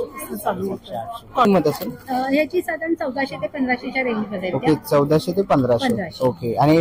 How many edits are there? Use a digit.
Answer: 1